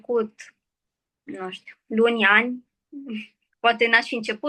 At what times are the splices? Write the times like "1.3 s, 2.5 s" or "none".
none